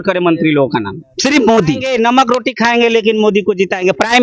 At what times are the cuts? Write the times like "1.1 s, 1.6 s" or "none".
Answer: 1.0 s, 1.9 s

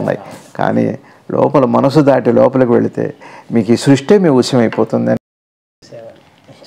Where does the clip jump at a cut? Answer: 5.7 s

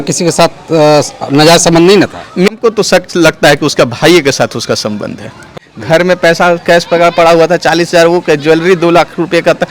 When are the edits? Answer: 2.5 s, 5.6 s

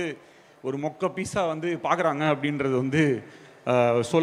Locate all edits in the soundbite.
none

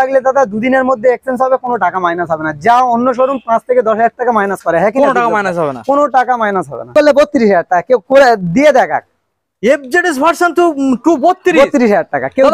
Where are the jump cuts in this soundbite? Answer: 6.9 s

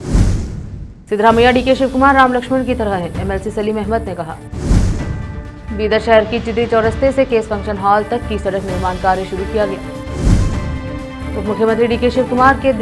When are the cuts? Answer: 0.9 s

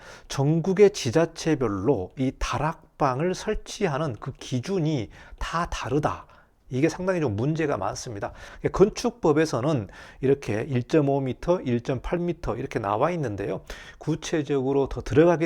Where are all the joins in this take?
8.4 s

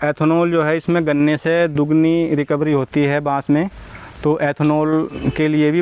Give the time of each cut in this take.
none

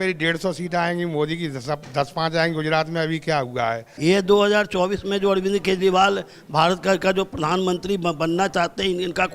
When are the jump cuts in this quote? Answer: 3.9 s

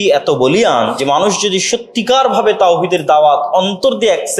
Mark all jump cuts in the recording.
1.0 s

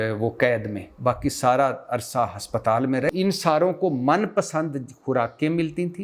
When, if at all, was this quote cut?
3.1 s

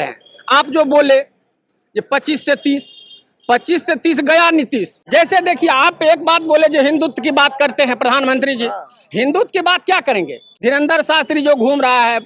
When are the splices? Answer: 5.0 s, 10.6 s

